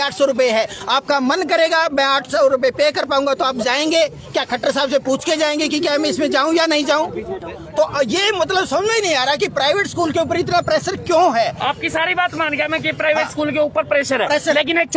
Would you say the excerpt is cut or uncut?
uncut